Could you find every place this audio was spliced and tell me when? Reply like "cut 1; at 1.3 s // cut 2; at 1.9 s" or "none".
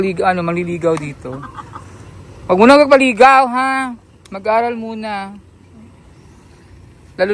none